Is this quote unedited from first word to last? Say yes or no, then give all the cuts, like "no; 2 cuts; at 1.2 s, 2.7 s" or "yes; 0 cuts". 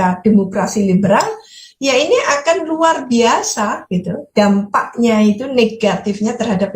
yes; 0 cuts